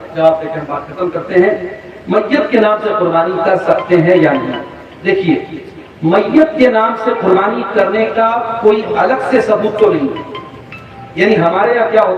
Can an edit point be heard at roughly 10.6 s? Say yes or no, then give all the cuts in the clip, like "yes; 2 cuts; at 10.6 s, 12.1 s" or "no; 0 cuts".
no; 0 cuts